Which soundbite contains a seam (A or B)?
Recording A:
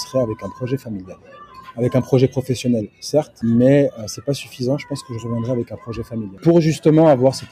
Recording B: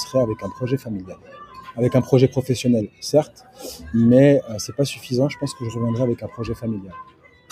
A